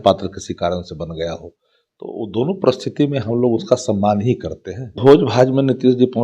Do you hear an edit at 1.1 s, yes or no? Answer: no